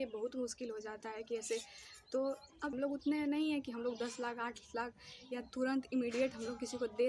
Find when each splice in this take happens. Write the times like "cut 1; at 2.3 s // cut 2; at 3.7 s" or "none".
cut 1; at 2.7 s